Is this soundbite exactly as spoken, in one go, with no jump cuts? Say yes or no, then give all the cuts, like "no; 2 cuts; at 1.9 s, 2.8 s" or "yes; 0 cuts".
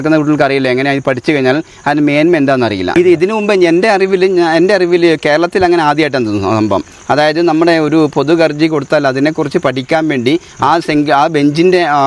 no; 1 cut; at 3.0 s